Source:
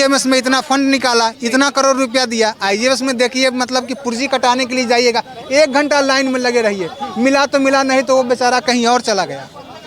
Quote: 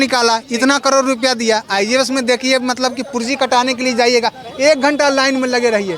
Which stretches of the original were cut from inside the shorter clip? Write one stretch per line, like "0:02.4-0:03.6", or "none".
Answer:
none